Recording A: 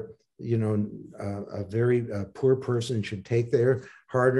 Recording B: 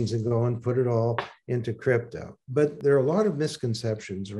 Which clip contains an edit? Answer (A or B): B